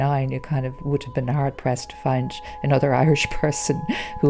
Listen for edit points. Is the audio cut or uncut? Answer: uncut